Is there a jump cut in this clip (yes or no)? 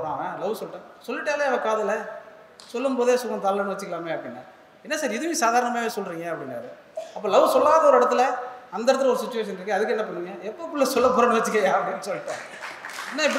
no